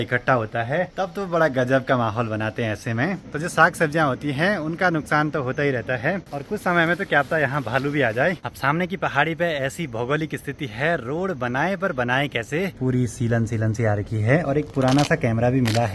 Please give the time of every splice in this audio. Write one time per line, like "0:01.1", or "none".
0:00.9
0:03.2
0:06.3
0:08.5
0:12.8